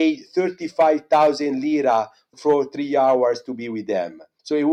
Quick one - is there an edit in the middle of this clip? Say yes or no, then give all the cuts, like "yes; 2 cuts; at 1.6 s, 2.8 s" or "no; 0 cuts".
no; 0 cuts